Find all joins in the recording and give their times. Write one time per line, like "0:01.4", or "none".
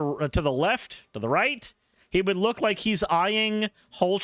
none